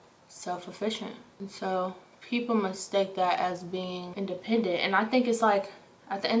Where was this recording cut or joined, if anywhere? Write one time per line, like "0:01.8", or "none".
0:04.0